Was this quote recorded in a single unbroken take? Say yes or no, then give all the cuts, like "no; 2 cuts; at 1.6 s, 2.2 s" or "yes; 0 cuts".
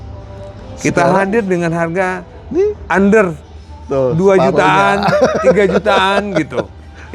yes; 0 cuts